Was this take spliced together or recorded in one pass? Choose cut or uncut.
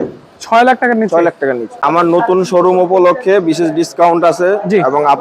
cut